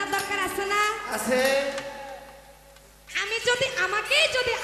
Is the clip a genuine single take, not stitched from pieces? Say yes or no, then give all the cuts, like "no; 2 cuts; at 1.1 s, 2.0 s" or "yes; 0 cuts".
yes; 0 cuts